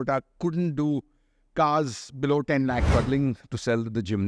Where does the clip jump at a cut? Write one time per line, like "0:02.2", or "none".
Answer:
0:02.9